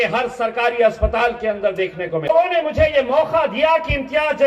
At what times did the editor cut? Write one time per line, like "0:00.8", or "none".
0:02.3